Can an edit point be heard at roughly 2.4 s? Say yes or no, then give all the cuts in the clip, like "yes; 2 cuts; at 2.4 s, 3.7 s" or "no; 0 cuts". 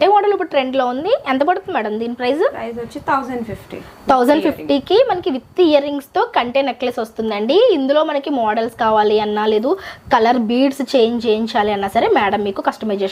no; 0 cuts